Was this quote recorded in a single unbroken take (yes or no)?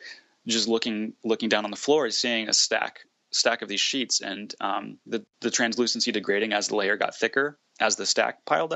yes